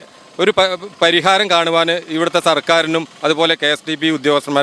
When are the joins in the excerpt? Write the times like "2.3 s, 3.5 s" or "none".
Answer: none